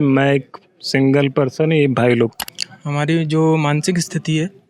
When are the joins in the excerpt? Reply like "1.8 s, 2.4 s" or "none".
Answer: 2.4 s